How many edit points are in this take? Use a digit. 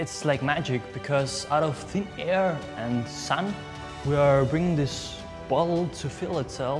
0